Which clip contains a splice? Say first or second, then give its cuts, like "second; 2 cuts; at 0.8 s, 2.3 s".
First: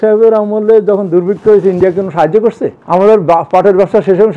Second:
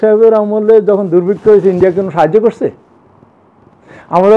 first; 1 cut; at 2.7 s